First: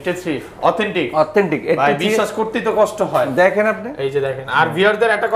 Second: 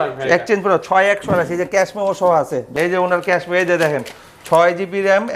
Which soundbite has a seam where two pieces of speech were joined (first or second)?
second